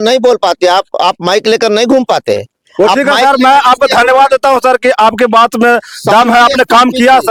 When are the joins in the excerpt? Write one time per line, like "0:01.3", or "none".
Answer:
none